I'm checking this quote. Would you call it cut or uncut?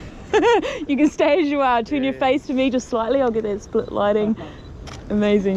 uncut